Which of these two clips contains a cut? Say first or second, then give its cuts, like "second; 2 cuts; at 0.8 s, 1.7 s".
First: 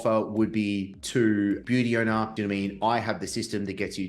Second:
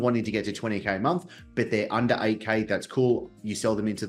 first; 2 cuts; at 0.9 s, 2.3 s